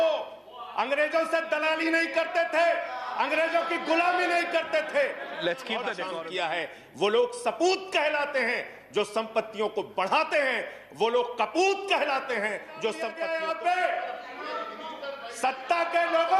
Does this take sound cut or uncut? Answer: cut